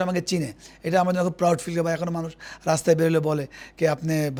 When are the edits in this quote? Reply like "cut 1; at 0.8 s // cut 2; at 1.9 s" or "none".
none